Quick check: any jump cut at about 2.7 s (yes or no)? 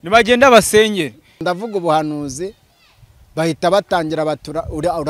no